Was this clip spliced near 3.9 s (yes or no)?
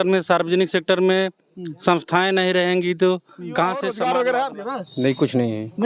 yes